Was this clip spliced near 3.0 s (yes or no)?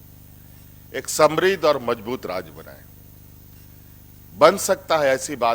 no